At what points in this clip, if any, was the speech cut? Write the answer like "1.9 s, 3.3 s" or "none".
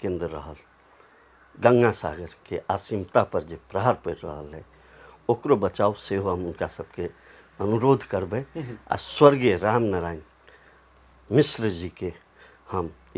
none